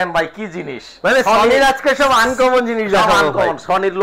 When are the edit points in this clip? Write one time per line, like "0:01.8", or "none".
none